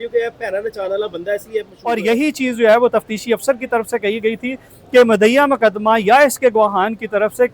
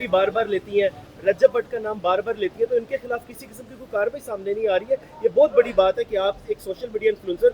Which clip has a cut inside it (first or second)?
first